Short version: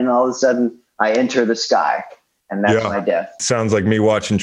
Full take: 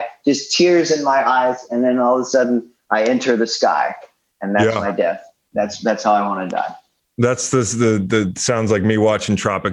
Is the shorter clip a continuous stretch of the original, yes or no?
no